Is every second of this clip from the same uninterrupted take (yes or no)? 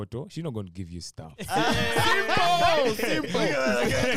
no